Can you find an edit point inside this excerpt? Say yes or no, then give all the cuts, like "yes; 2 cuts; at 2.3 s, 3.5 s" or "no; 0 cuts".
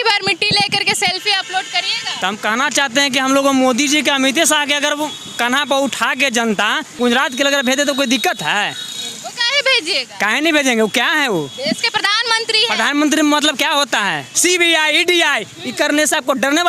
yes; 3 cuts; at 2.0 s, 6.9 s, 14.3 s